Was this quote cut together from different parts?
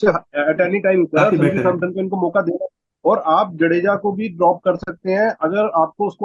yes; 1 cut; at 2.9 s

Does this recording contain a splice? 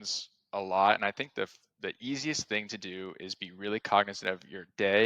no; 0 cuts

